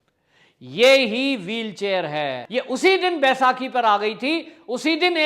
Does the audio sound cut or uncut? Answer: cut